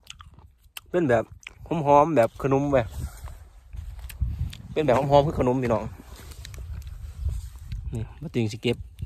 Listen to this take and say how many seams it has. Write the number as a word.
zero